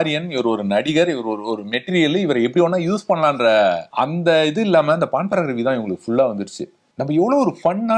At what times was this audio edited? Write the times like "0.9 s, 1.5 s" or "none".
3.9 s, 6.9 s